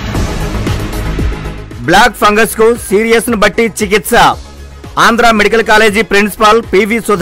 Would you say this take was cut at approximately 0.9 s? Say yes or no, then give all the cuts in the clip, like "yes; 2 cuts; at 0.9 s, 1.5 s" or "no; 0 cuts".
no; 0 cuts